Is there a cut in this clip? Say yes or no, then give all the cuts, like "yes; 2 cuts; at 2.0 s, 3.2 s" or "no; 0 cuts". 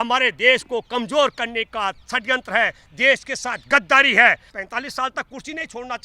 yes; 1 cut; at 4.5 s